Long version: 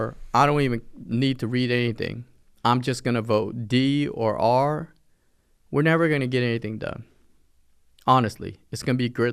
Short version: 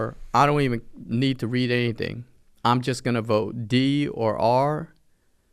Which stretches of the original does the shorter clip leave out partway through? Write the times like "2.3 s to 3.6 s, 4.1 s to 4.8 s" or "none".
none